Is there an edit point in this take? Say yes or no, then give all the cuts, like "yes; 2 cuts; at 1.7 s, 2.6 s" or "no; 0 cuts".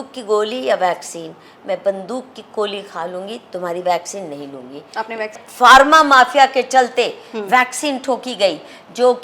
yes; 1 cut; at 5.4 s